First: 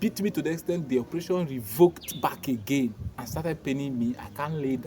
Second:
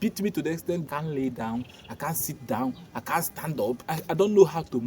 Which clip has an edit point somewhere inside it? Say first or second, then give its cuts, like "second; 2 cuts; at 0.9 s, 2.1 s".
second; 2 cuts; at 0.8 s, 3.9 s